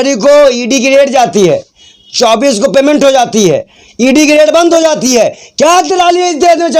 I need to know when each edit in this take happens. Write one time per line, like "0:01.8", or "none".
none